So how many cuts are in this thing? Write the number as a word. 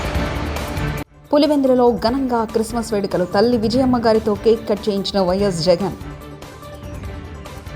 one